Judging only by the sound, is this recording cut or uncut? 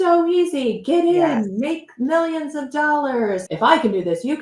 cut